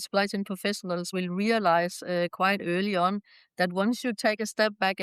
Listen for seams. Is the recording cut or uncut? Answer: cut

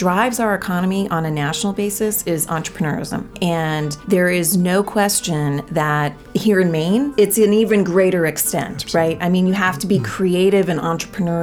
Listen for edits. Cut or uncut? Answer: cut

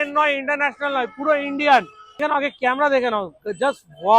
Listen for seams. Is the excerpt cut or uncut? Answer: cut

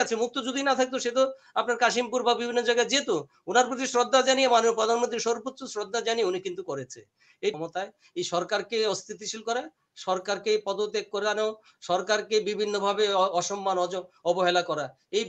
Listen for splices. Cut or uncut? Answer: cut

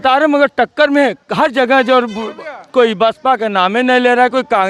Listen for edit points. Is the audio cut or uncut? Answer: uncut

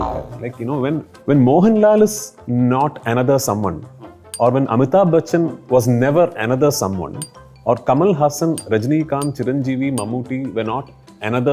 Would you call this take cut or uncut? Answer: cut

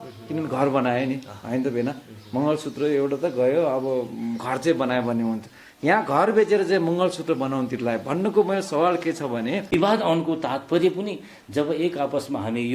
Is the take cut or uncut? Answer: cut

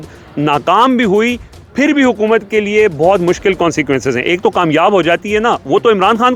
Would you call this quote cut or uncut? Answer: uncut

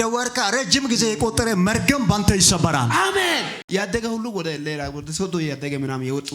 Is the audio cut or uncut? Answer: cut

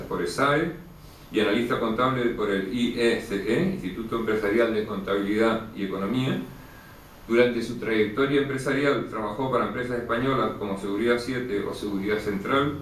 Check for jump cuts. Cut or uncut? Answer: uncut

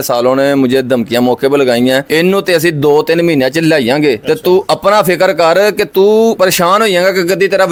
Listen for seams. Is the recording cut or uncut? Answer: uncut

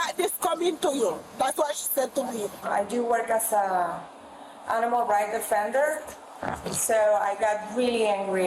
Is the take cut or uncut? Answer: cut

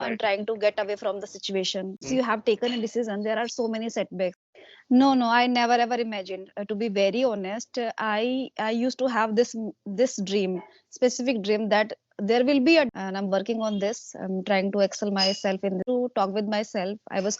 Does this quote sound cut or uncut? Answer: cut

